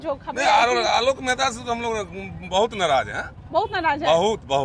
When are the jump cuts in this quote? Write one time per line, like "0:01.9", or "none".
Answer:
none